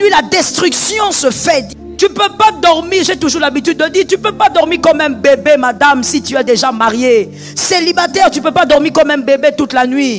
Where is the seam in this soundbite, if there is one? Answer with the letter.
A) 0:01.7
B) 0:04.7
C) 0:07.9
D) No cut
A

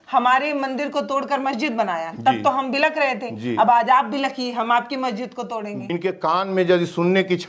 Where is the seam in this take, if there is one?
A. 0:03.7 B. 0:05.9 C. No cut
B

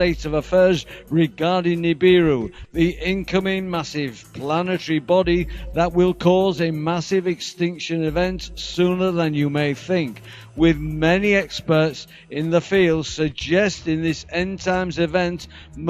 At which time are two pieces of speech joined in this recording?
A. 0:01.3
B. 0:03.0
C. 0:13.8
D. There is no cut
C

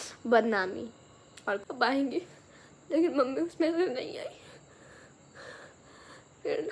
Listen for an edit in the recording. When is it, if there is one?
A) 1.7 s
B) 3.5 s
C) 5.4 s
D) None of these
A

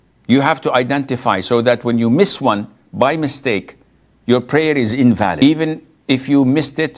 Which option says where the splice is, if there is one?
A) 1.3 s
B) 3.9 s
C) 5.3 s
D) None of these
C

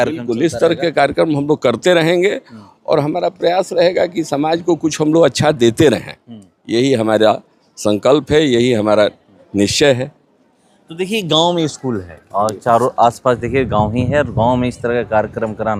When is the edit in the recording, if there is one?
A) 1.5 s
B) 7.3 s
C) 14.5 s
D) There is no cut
D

